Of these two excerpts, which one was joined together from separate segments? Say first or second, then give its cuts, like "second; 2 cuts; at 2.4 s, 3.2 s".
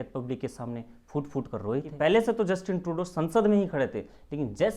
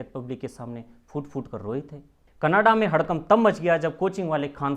first; 1 cut; at 1.9 s